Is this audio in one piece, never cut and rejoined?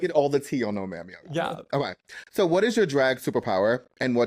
yes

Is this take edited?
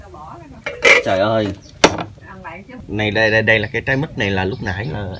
no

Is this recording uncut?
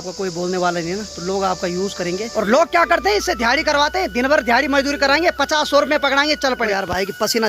no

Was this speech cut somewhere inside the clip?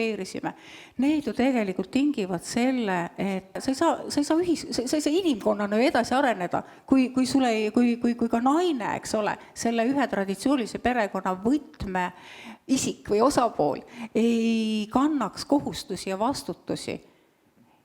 yes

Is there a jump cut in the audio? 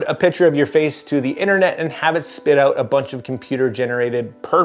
no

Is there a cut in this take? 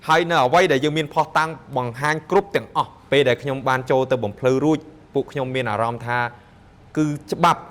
yes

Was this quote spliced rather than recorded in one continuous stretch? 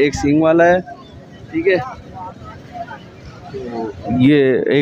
no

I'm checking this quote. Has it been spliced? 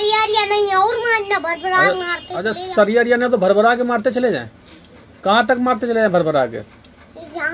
no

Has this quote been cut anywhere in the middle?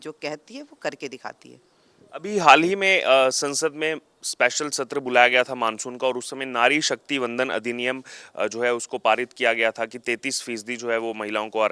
no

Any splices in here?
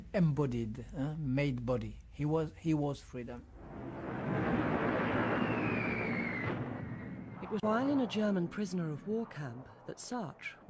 no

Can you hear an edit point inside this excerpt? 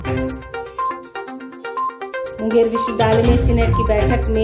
no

